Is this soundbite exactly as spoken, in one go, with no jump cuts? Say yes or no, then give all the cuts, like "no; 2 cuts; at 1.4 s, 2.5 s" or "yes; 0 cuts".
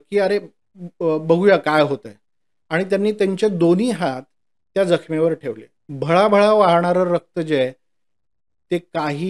yes; 0 cuts